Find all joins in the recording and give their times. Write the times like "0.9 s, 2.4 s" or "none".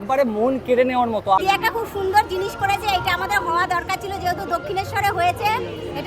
1.4 s